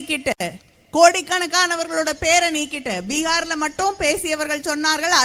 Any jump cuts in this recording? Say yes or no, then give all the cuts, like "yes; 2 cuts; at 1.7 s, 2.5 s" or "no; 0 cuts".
no; 0 cuts